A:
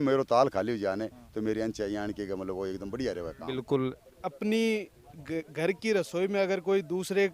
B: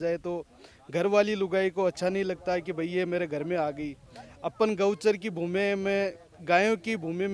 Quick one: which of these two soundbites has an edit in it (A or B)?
A